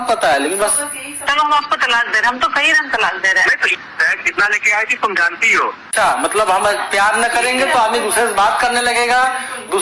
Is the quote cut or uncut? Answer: cut